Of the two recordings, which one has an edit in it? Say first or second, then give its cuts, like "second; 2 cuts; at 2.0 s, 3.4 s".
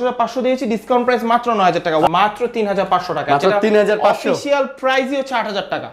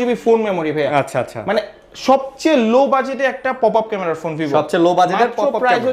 first; 1 cut; at 2.1 s